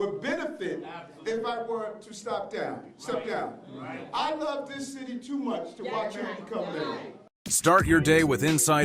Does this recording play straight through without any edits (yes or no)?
no